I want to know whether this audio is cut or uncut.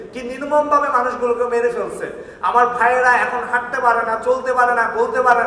uncut